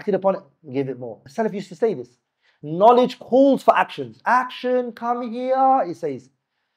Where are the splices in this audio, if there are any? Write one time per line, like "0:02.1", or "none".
0:01.2